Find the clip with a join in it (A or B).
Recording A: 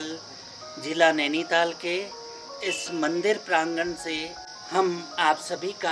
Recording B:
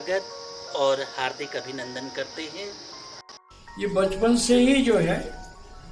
B